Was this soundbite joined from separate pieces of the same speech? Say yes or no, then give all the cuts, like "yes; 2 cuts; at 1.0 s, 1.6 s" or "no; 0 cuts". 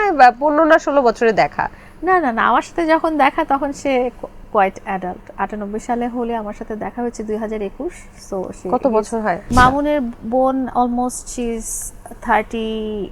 yes; 1 cut; at 9.5 s